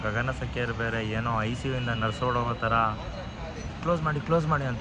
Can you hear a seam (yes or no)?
no